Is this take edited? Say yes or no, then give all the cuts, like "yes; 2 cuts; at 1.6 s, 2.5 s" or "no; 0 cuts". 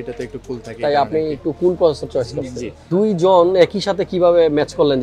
yes; 1 cut; at 2.9 s